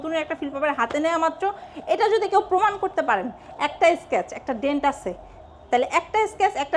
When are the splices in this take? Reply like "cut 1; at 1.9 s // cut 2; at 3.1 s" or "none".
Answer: none